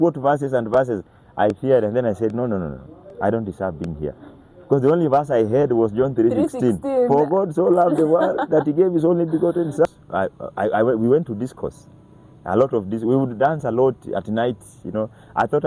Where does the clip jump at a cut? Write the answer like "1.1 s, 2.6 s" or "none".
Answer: 9.9 s